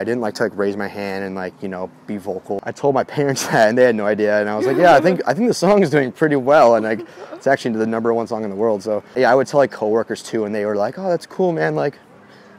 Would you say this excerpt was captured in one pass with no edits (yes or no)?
no